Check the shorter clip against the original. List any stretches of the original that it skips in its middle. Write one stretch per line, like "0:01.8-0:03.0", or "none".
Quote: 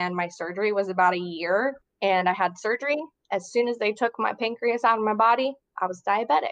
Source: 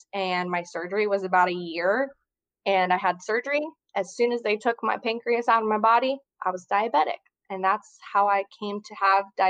0:02.2-0:02.5